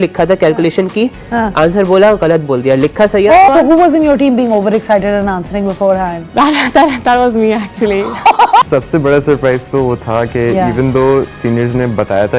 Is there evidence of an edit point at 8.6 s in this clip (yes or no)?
yes